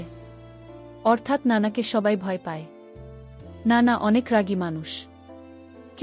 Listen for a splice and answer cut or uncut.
uncut